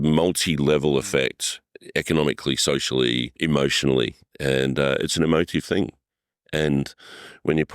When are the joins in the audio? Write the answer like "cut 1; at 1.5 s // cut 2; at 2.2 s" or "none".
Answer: cut 1; at 3.4 s